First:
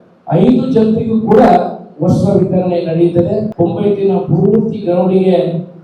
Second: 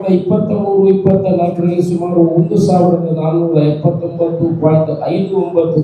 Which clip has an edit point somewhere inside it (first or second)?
first